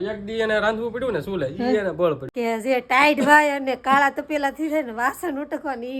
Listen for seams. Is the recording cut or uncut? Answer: cut